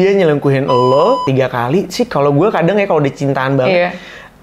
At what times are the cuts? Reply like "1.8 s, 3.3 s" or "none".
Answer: 1.3 s